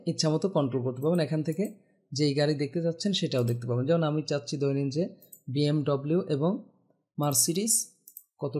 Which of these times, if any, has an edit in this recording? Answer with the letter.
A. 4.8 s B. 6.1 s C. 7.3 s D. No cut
D